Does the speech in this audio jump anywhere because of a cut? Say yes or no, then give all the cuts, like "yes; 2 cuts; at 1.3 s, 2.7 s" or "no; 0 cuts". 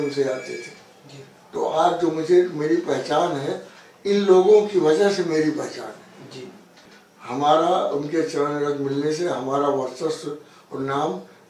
yes; 1 cut; at 6.8 s